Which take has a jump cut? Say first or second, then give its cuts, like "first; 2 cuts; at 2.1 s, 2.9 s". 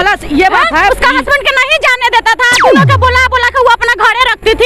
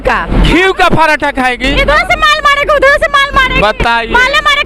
first; 1 cut; at 0.9 s